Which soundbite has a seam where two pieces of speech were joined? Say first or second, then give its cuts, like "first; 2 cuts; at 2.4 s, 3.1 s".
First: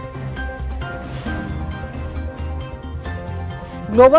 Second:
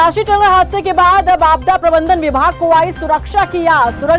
first; 1 cut; at 1.3 s